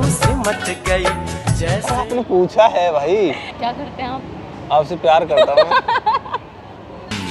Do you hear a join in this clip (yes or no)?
yes